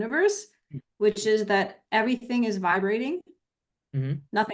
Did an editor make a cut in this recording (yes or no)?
no